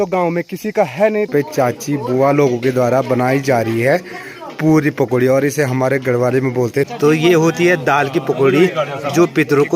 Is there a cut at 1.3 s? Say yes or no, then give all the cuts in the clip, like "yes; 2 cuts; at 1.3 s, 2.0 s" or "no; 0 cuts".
yes; 2 cuts; at 1.3 s, 6.9 s